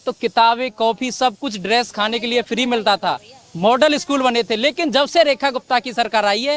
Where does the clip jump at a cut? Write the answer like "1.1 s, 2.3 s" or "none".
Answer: none